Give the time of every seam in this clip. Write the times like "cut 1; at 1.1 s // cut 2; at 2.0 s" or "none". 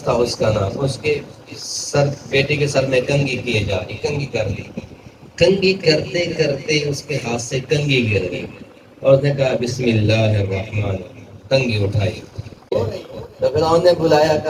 cut 1; at 12.7 s